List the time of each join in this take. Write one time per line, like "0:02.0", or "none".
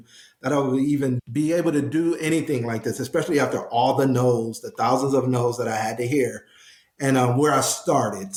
none